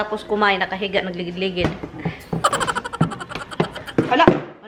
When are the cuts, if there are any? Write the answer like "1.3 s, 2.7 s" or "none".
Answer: none